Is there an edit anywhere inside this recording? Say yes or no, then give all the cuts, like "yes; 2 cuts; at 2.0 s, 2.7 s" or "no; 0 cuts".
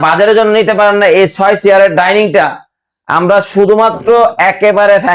no; 0 cuts